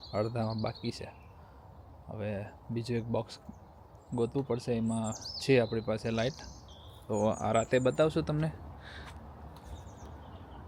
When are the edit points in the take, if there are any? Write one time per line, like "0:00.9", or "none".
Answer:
none

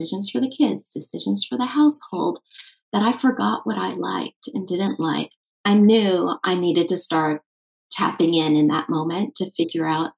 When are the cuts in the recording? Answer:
0:05.5

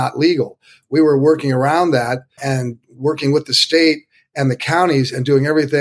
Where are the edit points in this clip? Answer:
0:02.3

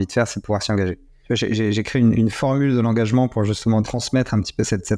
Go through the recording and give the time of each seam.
0:01.1
0:03.8

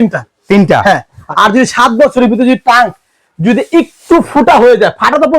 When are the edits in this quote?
0:01.2

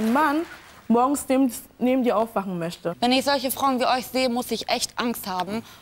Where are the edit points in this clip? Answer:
0:02.8

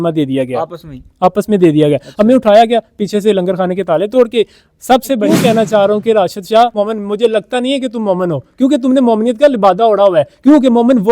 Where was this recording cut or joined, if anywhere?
0:05.2
0:06.8

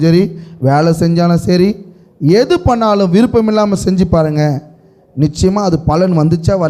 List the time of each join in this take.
none

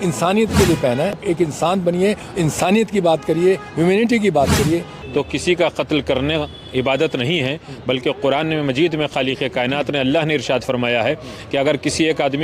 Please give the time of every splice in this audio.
0:01.2
0:05.0

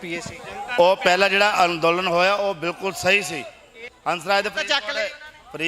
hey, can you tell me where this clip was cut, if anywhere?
0:03.9

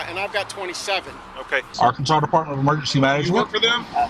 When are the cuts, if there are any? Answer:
0:01.7

